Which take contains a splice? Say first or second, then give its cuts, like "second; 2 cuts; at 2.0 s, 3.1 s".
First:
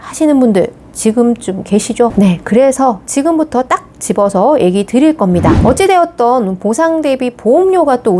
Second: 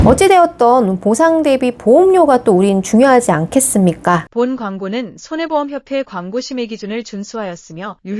second; 1 cut; at 4.3 s